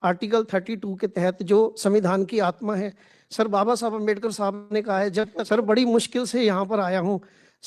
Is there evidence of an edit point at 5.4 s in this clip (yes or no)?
yes